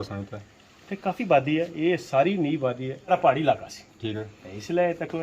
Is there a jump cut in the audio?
yes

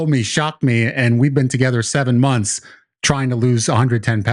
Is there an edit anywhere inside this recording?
no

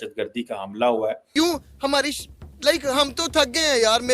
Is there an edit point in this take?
yes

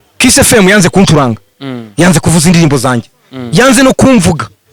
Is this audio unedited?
yes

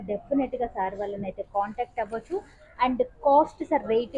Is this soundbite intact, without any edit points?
yes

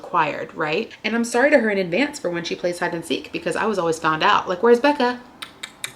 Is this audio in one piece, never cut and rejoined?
no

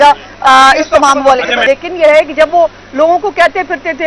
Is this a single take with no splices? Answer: no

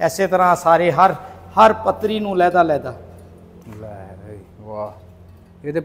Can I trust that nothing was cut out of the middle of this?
yes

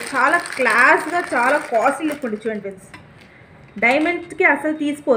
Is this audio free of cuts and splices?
yes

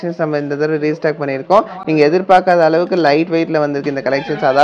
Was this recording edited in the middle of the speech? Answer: no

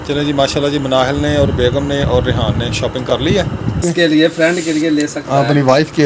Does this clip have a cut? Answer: yes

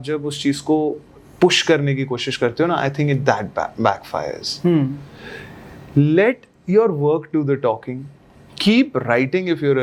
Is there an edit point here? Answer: no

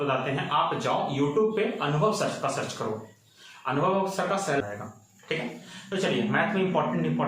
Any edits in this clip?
yes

